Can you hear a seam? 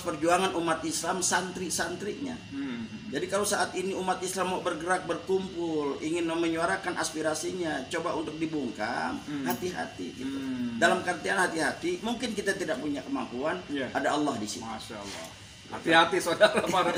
no; 0 cuts

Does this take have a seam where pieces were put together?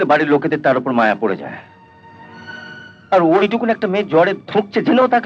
no; 0 cuts

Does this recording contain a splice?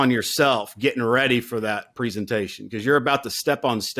no; 0 cuts

